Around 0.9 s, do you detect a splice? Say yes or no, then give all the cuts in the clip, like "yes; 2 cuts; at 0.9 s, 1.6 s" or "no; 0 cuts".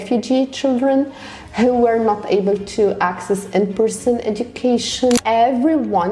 no; 1 cut; at 5.2 s